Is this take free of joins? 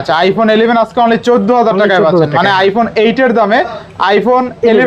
yes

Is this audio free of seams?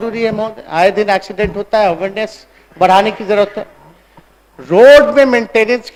yes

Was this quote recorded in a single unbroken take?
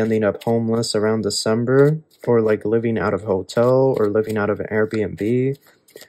yes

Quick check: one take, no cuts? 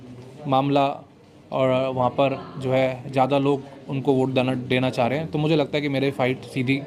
yes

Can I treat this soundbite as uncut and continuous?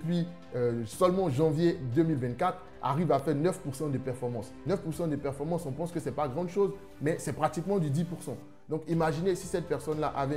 no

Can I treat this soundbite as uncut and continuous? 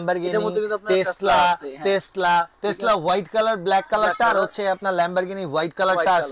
yes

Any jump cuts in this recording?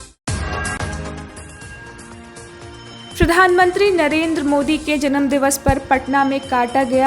yes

